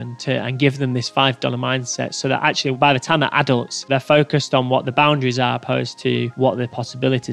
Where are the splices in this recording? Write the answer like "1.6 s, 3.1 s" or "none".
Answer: 3.8 s, 6.3 s